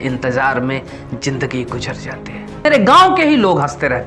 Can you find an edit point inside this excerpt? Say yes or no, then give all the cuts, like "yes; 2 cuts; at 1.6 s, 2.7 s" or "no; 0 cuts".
yes; 1 cut; at 2.6 s